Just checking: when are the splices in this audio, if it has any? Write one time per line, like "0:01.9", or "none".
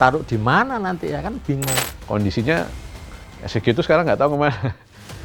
0:01.9